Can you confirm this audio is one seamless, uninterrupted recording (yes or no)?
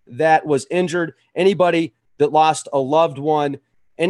no